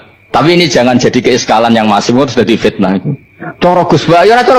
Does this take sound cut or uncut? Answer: uncut